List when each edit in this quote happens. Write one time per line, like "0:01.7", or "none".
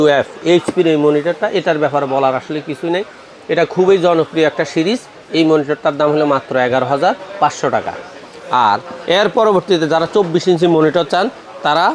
none